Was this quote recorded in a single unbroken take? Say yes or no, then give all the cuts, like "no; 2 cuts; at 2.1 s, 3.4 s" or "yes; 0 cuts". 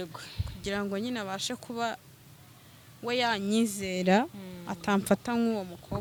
yes; 0 cuts